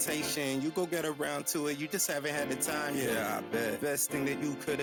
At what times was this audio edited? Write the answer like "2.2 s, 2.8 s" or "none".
none